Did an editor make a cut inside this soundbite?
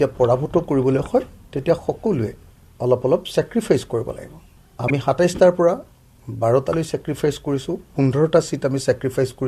no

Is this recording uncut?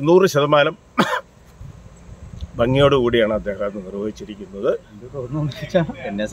no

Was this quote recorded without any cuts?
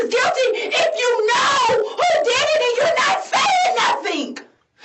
yes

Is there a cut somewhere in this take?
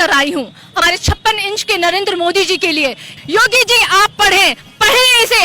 yes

